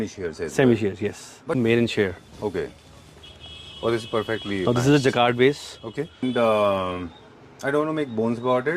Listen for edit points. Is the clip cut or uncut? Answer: cut